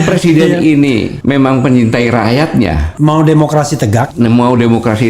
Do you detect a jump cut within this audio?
yes; 3 cuts; at 1.1 s, 2.8 s, 4.1 s

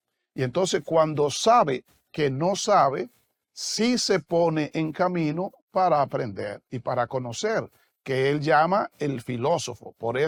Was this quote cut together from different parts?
no; 0 cuts

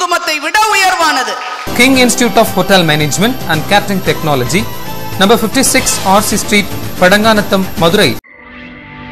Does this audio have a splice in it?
yes; 1 cut; at 1.6 s

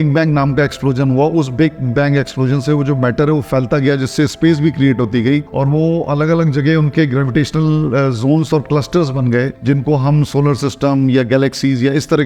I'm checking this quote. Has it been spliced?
no; 0 cuts

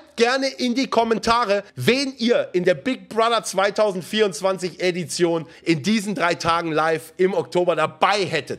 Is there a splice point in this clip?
yes; 2 cuts; at 1.7 s, 5.5 s

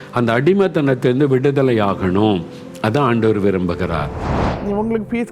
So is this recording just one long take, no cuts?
no; 1 cut; at 4.3 s

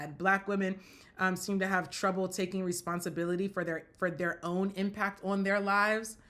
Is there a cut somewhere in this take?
no; 0 cuts

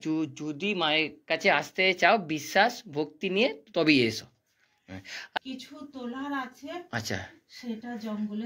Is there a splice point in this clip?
yes; 1 cut; at 5.4 s

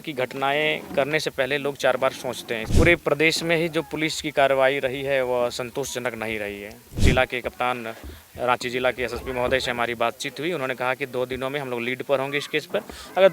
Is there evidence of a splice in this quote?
yes; 2 cuts; at 2.6 s, 7.0 s

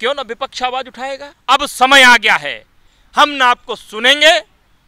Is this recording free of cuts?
no; 1 cut; at 1.3 s

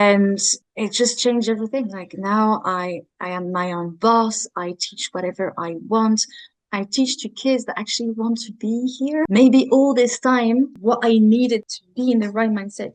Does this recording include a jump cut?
yes; 3 cuts; at 9.2 s, 10.7 s, 11.8 s

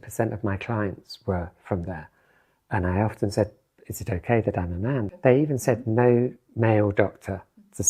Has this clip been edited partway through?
yes; 1 cut; at 5.1 s

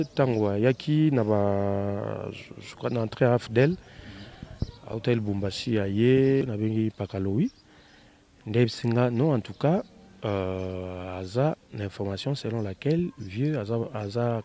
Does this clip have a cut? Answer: yes; 1 cut; at 6.4 s

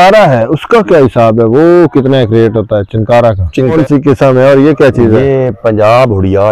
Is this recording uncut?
no; 1 cut; at 3.7 s

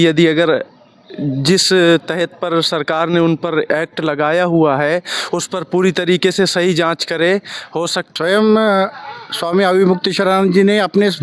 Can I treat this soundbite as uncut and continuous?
no; 1 cut; at 8.1 s

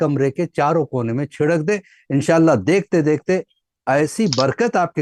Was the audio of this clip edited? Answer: no; 0 cuts

